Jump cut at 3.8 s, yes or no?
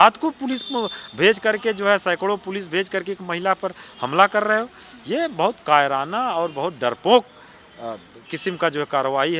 no